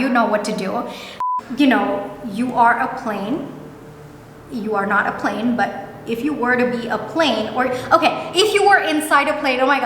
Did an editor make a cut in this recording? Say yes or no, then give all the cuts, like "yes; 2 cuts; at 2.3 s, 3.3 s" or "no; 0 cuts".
yes; 1 cut; at 1.2 s